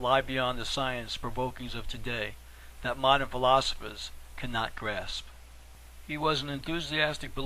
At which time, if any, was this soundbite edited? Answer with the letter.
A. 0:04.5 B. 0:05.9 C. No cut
C